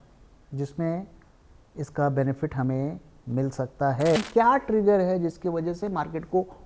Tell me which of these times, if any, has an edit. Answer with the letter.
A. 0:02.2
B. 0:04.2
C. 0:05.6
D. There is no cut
B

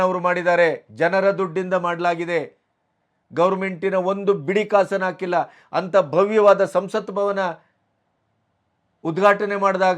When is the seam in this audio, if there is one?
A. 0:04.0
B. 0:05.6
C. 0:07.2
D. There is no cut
D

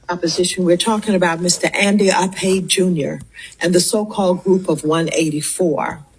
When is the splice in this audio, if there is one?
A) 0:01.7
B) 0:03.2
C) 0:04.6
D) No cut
A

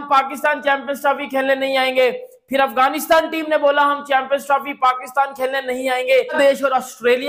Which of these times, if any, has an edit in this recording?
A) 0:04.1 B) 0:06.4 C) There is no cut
B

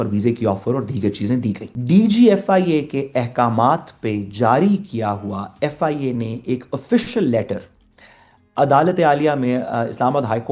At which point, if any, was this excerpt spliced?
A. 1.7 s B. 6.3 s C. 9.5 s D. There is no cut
A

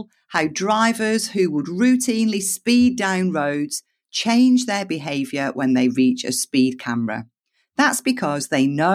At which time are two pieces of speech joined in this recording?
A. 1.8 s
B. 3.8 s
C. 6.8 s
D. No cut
D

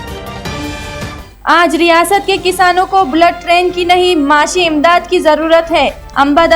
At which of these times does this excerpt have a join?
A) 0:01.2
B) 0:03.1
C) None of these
A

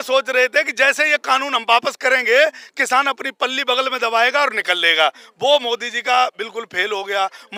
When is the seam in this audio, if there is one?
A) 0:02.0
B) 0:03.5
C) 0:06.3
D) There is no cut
D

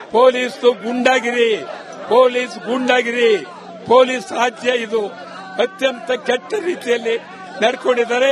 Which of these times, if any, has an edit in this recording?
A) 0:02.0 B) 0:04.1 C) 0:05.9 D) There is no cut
B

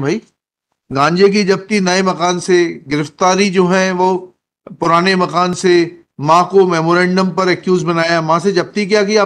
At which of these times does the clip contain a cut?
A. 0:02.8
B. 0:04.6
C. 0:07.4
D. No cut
D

